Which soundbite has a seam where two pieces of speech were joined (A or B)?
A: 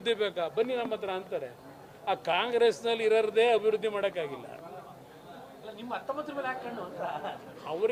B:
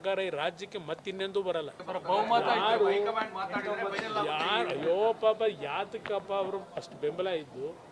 B